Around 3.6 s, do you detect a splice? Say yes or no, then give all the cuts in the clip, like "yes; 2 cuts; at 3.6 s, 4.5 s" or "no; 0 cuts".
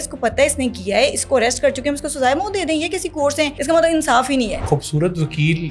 yes; 2 cuts; at 3.6 s, 4.6 s